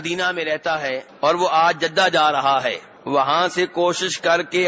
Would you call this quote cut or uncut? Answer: cut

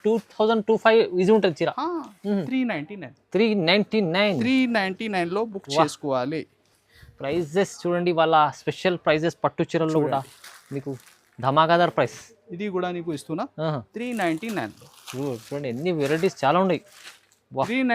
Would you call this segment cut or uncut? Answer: cut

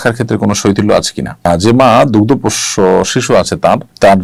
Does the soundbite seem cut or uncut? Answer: uncut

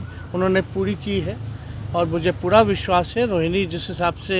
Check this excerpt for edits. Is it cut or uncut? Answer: uncut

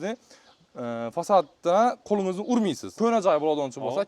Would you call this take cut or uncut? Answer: cut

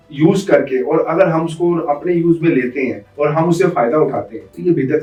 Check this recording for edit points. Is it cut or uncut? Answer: uncut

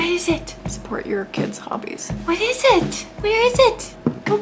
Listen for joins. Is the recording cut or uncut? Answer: uncut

